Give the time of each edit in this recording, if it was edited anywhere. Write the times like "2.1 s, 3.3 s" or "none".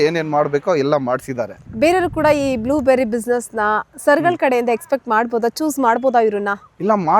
none